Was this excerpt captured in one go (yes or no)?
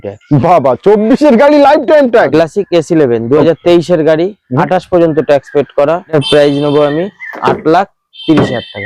no